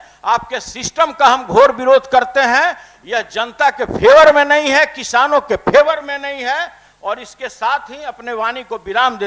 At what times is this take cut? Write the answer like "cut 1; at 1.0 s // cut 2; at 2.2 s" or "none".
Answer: none